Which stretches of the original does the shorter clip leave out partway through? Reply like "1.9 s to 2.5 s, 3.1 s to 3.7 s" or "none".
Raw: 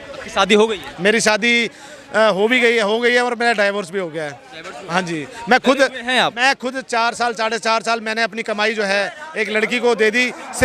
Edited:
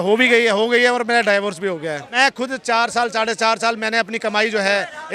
4.4 s to 6.4 s